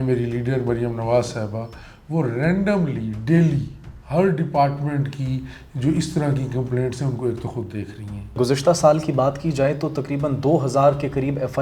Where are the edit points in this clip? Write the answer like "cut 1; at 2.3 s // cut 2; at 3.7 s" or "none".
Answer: cut 1; at 8.4 s